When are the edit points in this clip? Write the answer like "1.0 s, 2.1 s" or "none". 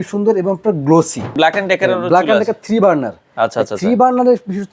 1.3 s